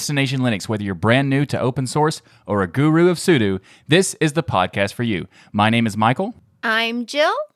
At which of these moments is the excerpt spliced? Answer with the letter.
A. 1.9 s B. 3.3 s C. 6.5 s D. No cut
C